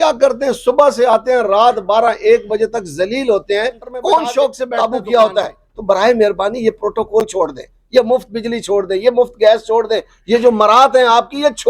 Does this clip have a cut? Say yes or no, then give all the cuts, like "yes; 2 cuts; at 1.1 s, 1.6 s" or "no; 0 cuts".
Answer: yes; 1 cut; at 4.7 s